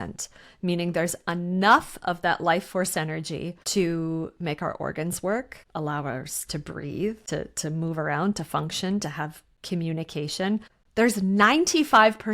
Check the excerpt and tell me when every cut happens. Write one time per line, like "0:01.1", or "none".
0:10.8